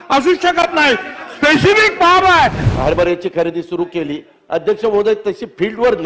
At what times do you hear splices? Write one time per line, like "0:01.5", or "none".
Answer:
0:02.6